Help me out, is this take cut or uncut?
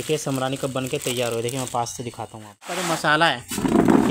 cut